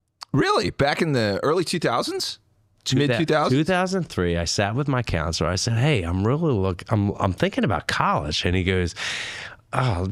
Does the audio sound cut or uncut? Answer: uncut